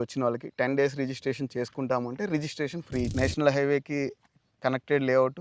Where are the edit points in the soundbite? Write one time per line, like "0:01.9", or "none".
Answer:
0:03.1

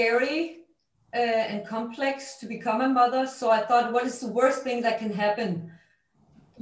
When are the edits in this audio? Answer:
none

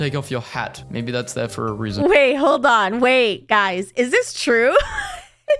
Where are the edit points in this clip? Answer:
none

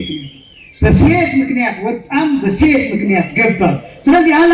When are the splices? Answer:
none

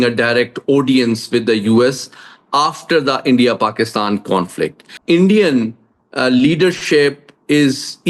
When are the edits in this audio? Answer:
0:04.9

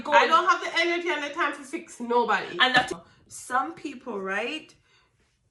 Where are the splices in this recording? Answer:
0:03.0

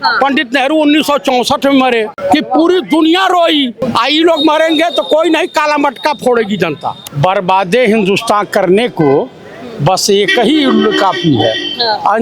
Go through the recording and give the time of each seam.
0:02.1
0:03.8
0:07.1

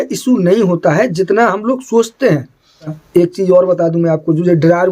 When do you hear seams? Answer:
0:02.9

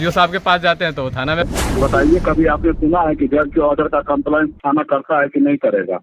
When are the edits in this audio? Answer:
0:01.5

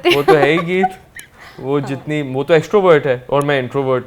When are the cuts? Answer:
none

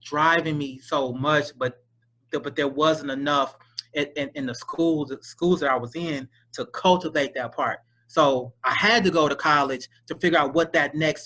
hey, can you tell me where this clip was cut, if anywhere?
none

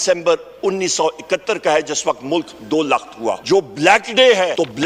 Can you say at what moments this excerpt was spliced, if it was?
0:03.4

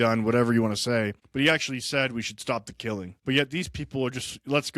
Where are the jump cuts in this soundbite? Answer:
0:01.2
0:03.1

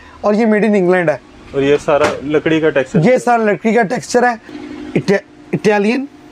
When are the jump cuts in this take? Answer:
0:04.5

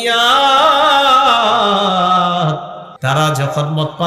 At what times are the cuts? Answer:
0:03.2

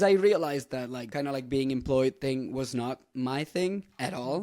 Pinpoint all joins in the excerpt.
0:01.1

